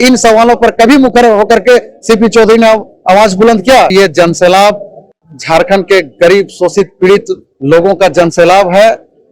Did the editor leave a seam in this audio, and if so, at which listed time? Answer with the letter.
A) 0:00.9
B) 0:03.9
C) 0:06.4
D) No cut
B